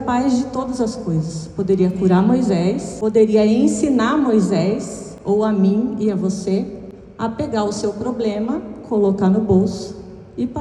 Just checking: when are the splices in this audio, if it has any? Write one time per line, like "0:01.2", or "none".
0:02.9